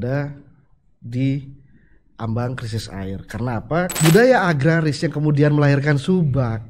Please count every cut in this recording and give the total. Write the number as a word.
one